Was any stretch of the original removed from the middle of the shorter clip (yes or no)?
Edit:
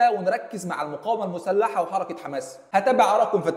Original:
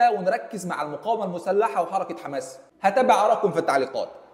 yes